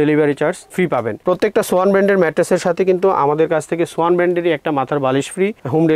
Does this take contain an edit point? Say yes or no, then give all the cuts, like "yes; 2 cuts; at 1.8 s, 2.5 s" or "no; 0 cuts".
yes; 1 cut; at 1.2 s